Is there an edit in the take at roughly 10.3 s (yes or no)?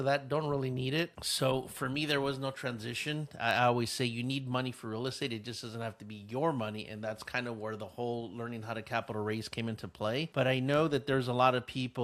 no